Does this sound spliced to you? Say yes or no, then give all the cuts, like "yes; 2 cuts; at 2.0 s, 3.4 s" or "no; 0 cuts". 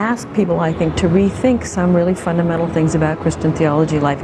no; 0 cuts